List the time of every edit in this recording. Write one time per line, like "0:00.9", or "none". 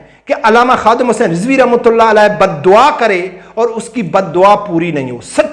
none